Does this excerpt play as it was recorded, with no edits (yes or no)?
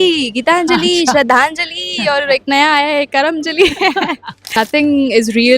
no